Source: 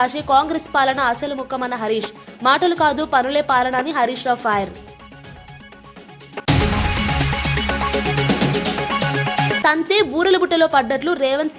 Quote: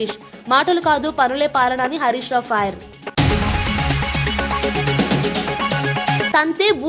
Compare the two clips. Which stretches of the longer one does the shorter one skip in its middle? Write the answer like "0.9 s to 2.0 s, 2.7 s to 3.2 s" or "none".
4.9 s to 6.2 s